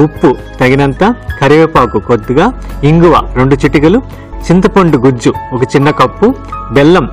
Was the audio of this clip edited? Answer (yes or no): yes